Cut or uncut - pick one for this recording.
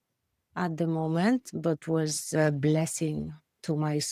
cut